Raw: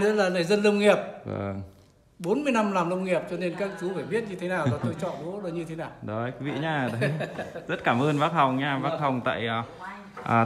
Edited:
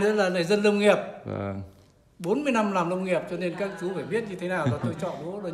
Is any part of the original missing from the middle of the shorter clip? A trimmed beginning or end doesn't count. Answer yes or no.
no